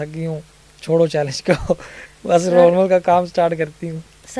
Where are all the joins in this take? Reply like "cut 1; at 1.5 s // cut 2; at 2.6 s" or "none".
none